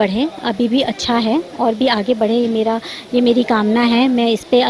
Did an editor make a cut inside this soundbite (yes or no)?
no